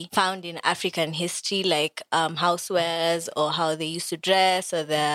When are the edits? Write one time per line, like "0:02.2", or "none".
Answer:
none